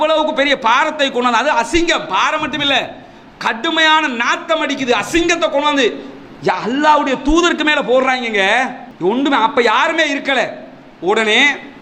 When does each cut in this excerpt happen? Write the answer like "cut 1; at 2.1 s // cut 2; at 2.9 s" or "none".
none